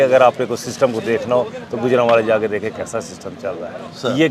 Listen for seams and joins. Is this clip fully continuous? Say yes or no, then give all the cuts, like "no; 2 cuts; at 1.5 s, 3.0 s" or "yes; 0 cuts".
yes; 0 cuts